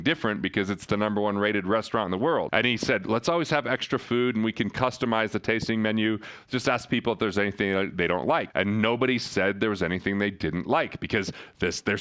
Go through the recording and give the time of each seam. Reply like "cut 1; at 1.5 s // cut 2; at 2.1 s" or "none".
cut 1; at 2.5 s // cut 2; at 8.5 s